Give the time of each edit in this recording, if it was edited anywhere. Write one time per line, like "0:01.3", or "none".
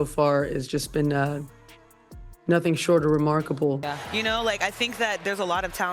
0:03.8